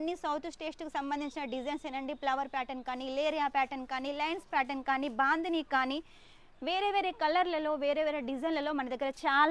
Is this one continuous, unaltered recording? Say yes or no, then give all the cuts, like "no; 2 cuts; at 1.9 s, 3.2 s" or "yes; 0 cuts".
yes; 0 cuts